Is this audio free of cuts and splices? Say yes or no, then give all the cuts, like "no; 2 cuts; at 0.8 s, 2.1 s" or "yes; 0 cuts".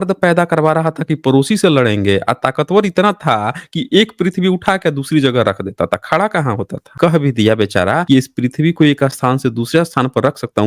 no; 2 cuts; at 6.8 s, 8.0 s